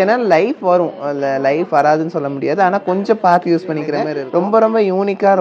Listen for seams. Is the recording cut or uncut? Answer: cut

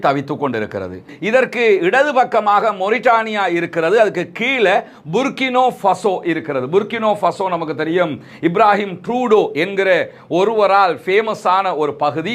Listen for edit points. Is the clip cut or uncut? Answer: cut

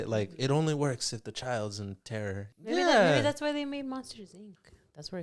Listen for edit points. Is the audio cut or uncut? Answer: cut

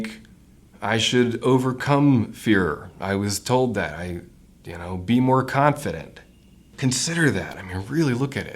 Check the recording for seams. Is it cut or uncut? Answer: cut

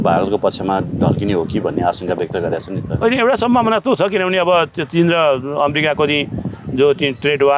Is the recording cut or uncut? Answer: uncut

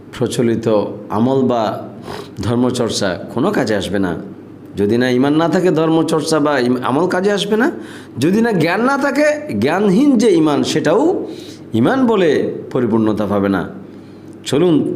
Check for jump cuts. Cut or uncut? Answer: uncut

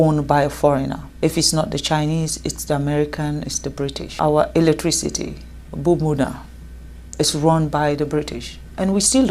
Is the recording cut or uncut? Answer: cut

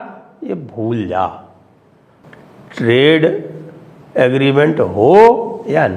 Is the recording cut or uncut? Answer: uncut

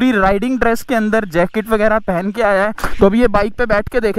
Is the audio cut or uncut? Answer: cut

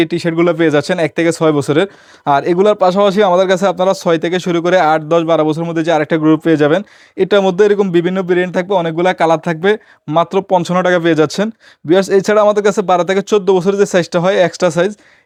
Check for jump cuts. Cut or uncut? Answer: uncut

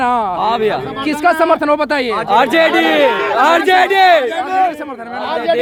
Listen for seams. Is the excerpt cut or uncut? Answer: uncut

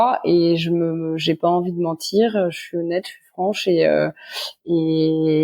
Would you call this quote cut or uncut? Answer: uncut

